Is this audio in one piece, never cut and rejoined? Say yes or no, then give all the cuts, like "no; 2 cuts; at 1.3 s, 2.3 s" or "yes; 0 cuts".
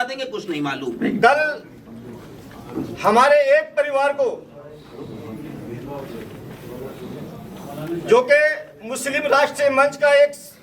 yes; 0 cuts